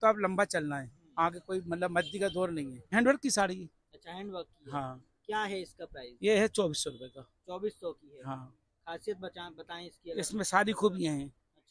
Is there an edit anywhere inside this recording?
yes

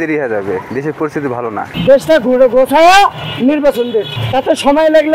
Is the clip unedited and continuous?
no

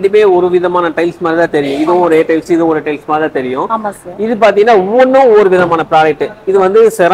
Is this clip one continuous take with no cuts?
yes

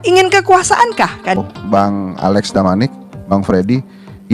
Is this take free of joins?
no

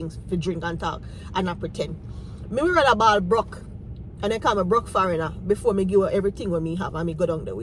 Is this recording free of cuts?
yes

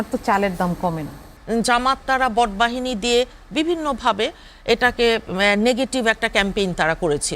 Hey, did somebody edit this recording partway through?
yes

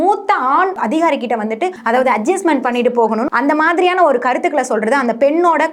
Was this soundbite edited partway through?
yes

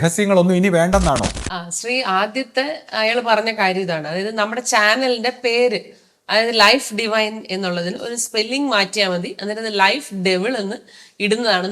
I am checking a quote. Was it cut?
yes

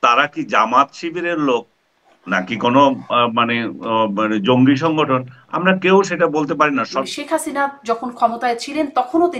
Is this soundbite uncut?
no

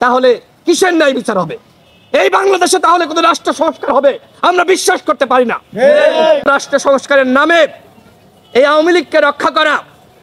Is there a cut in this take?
yes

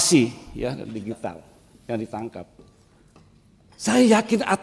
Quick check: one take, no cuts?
yes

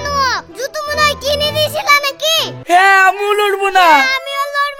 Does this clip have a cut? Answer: yes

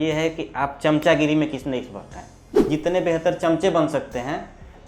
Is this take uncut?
no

